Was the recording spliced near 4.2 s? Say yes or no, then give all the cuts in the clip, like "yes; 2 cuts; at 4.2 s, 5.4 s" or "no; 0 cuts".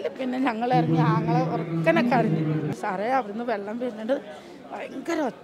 no; 1 cut; at 2.7 s